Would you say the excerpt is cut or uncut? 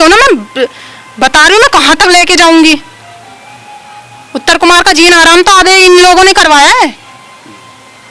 uncut